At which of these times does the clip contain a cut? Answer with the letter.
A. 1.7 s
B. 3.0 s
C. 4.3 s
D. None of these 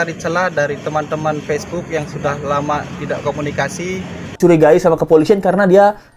C